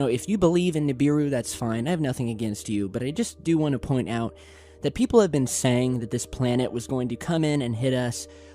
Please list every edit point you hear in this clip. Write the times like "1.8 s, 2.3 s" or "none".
2.9 s